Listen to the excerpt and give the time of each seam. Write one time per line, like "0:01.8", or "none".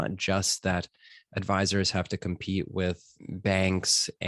0:03.1

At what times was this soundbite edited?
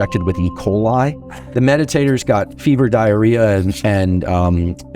0:01.4

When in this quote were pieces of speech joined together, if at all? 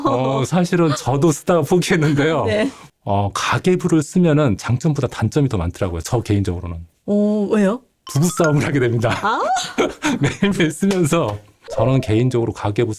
0:11.6

